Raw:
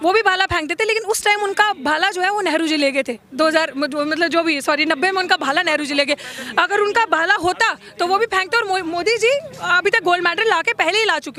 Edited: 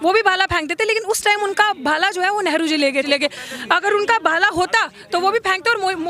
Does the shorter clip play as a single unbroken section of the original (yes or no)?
no